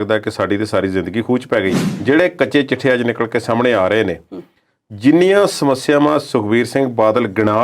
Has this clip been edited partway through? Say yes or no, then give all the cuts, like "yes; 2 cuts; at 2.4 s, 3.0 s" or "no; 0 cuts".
yes; 1 cut; at 1.9 s